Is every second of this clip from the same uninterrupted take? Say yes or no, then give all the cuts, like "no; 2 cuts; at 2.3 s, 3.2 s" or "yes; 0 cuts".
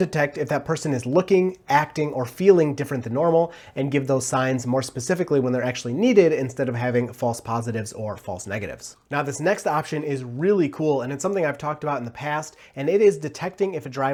yes; 0 cuts